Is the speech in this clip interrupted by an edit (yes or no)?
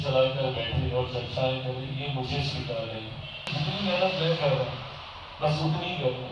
yes